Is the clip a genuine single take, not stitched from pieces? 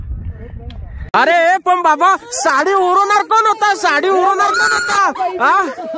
no; 1 cut; at 1.1 s

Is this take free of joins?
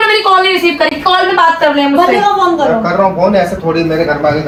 yes; 0 cuts

